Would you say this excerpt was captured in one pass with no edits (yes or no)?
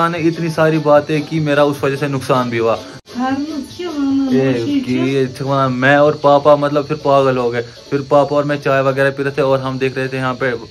no